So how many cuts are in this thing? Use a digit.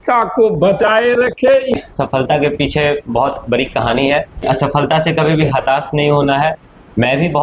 2